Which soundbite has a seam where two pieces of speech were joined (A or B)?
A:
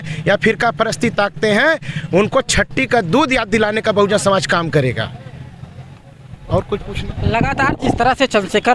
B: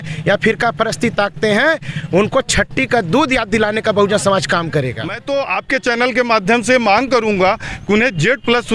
B